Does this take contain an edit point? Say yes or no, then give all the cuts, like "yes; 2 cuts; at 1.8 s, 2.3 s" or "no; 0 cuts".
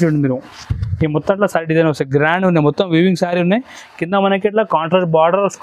no; 0 cuts